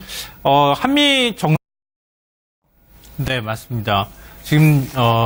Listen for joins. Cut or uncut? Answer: uncut